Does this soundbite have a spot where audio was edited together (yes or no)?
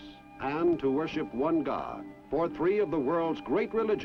no